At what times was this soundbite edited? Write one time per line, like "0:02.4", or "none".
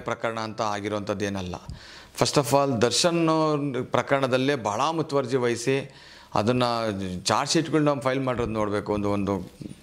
none